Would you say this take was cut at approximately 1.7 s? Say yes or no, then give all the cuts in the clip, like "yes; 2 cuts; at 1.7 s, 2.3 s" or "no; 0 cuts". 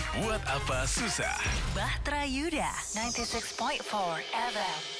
no; 0 cuts